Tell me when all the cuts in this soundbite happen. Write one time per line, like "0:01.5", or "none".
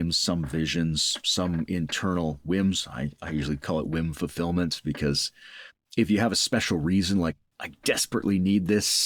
none

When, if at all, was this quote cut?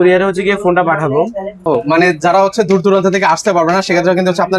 0:01.5

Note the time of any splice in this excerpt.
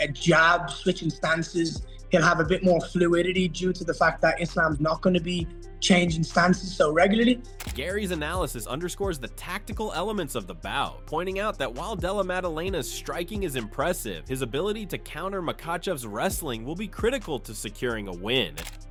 none

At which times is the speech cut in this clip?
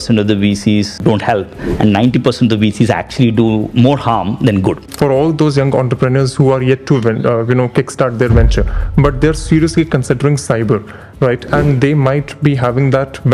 0:01.0
0:04.9

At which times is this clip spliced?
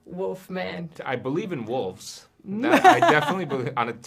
0:00.9

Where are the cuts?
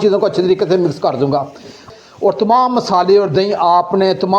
0:01.8

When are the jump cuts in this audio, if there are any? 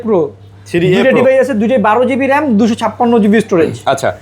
none

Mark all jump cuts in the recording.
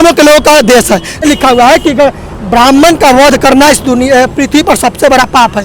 0:01.2

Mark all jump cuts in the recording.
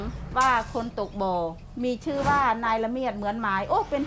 0:01.6

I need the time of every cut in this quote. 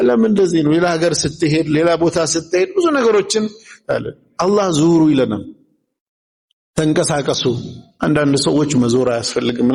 none

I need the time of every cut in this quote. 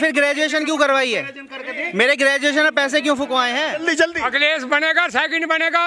0:03.8

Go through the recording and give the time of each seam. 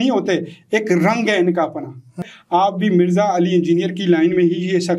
0:02.2

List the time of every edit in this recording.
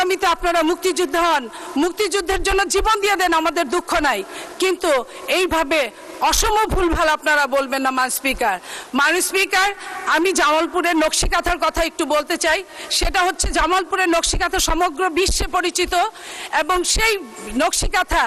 none

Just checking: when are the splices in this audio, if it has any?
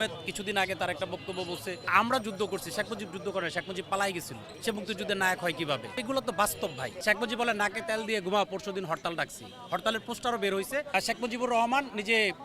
0:01.9
0:04.4
0:05.9
0:06.9
0:10.9

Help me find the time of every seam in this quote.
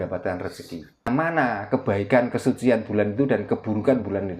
0:01.1

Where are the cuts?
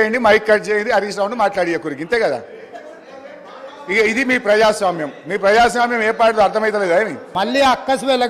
0:07.2

